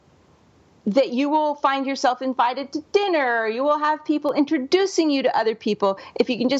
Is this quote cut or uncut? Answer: uncut